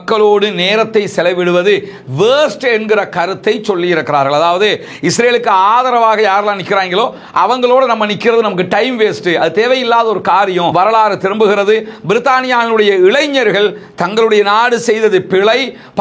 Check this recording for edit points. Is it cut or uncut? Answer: cut